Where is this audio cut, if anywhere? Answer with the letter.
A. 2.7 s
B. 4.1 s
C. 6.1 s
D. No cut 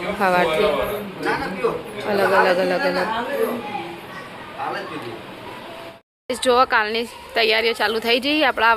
C